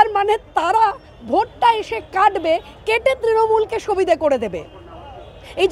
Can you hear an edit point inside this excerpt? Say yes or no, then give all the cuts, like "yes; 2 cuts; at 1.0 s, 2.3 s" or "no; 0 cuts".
no; 0 cuts